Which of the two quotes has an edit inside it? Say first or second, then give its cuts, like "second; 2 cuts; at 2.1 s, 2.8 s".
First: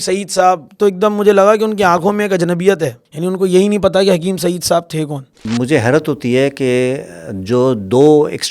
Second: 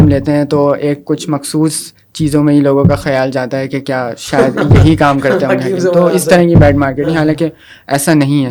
first; 2 cuts; at 3.1 s, 5.4 s